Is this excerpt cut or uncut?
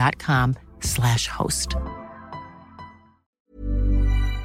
cut